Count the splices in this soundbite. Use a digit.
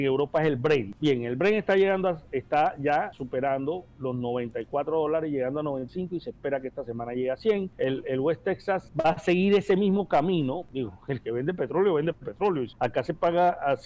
7